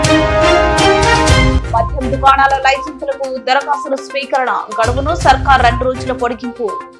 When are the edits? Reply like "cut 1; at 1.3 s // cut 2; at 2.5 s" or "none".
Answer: none